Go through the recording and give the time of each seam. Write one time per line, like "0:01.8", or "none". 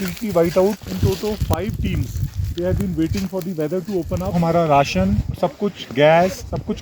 0:00.8
0:04.3
0:05.3